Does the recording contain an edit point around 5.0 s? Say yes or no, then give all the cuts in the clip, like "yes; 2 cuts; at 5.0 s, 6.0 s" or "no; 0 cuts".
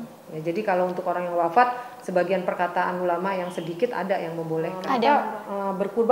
yes; 1 cut; at 5.0 s